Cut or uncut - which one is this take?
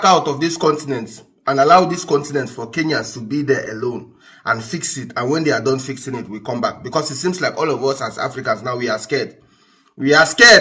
uncut